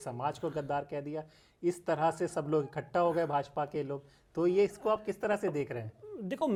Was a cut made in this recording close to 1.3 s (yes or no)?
no